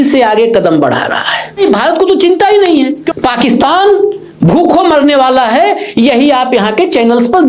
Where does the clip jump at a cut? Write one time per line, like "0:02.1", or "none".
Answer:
0:01.6
0:03.0